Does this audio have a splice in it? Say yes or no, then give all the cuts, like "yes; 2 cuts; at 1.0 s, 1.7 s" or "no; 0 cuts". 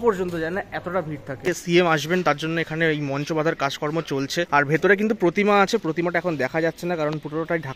yes; 2 cuts; at 1.5 s, 4.5 s